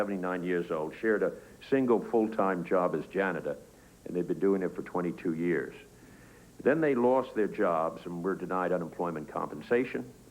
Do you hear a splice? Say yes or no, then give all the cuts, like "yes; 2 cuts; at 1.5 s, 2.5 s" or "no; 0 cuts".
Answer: yes; 1 cut; at 3.1 s